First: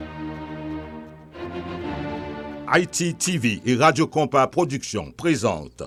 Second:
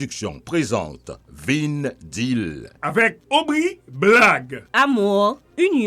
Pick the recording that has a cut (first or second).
second